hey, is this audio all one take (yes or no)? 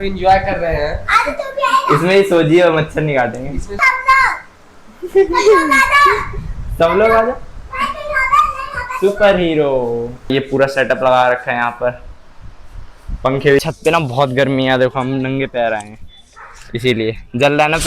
no